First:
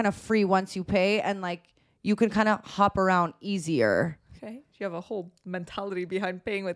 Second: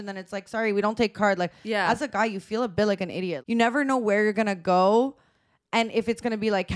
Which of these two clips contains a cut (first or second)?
second